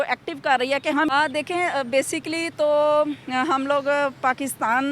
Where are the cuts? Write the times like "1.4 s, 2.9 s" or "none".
1.1 s